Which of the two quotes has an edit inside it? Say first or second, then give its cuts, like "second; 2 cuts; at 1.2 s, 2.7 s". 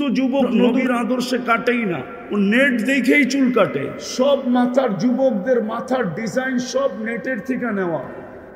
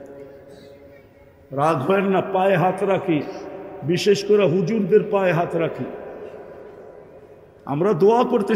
first; 3 cuts; at 0.8 s, 2.1 s, 4.0 s